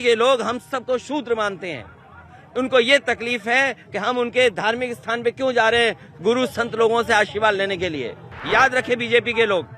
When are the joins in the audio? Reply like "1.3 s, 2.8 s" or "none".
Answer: 8.3 s